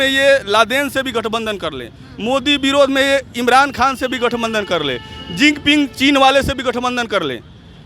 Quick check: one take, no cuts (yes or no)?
yes